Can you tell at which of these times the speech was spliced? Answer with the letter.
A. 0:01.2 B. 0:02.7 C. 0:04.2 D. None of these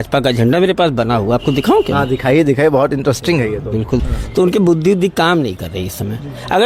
C